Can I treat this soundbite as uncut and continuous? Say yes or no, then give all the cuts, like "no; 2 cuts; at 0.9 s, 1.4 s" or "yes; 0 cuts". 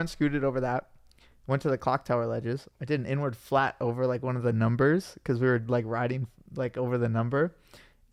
yes; 0 cuts